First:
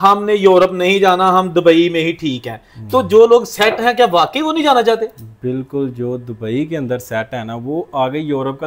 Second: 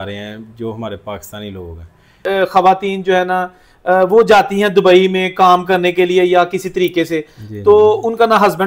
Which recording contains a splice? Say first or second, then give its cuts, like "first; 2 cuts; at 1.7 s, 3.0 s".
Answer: second; 1 cut; at 2.2 s